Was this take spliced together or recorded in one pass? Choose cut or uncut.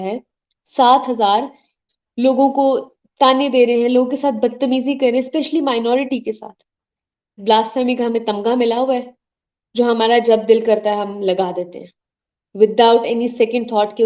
cut